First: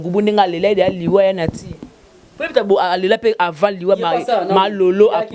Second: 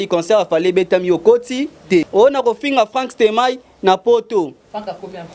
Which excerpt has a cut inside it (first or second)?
second